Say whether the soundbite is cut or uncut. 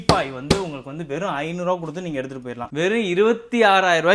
cut